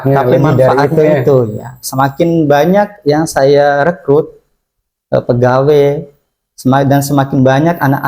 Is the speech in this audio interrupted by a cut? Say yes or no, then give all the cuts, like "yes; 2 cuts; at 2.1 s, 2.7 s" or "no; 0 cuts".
no; 0 cuts